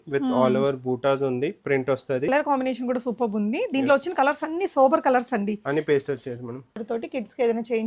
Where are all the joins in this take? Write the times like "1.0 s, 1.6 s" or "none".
2.3 s, 6.8 s